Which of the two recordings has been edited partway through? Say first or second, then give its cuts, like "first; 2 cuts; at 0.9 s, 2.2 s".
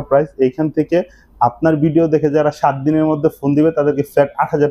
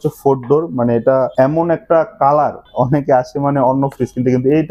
second; 2 cuts; at 1.3 s, 2.6 s